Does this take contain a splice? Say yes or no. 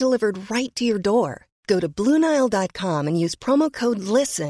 no